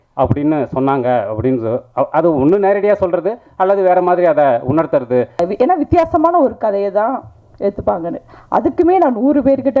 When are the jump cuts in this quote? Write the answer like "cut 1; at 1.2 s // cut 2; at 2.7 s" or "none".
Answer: cut 1; at 5.4 s